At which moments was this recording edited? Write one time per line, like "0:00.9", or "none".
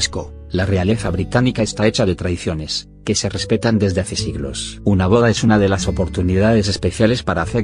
none